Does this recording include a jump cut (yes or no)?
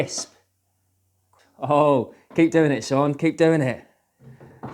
yes